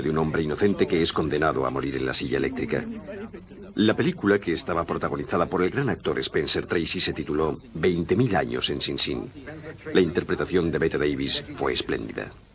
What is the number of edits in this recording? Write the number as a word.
one